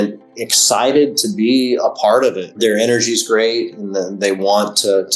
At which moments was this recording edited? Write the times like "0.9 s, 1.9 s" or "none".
2.5 s